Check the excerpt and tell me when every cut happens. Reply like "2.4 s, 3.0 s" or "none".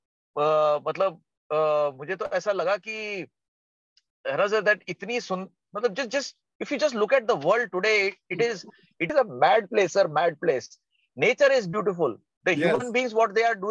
9.1 s